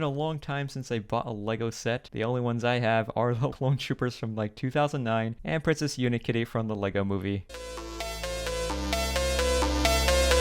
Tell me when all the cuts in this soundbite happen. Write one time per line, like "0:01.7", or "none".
0:03.5
0:07.5